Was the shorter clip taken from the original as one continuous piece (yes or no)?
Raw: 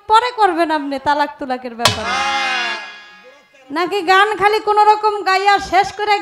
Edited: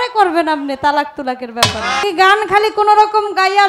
no